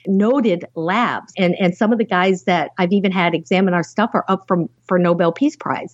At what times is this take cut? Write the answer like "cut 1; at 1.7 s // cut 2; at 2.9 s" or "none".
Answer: cut 1; at 1.3 s